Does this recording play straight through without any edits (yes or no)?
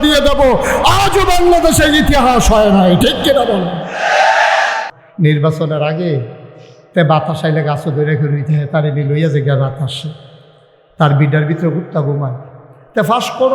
no